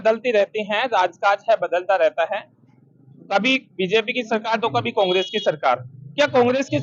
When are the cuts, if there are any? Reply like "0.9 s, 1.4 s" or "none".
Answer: none